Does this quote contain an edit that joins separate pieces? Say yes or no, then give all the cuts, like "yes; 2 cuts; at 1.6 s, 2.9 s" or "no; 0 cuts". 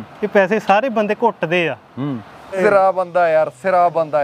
yes; 1 cut; at 2.5 s